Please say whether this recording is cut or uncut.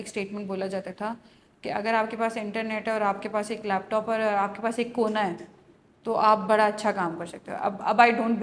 uncut